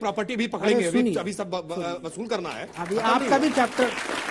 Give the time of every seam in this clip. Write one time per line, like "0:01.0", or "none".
none